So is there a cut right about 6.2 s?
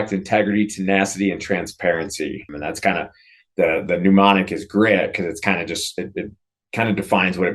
no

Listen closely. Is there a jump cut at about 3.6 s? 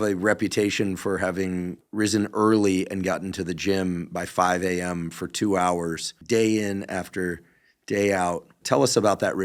no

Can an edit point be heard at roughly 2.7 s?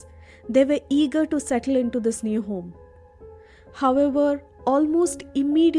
no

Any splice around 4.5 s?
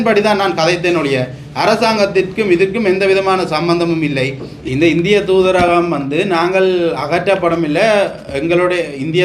yes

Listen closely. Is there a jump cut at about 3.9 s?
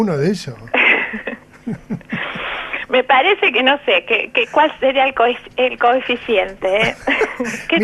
yes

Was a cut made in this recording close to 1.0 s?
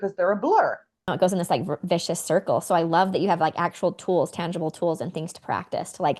yes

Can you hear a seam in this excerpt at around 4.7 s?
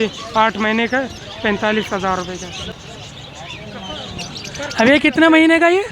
no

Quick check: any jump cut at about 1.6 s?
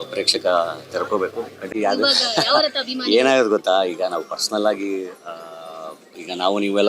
yes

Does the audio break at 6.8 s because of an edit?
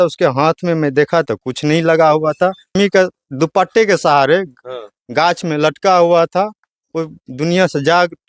no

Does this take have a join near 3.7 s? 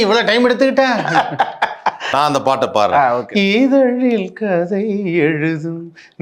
no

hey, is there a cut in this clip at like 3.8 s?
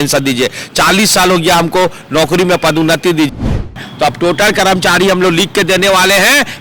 yes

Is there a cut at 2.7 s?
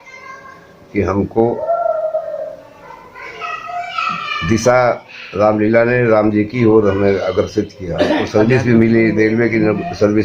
no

